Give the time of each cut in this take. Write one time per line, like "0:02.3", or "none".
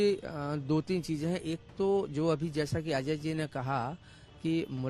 none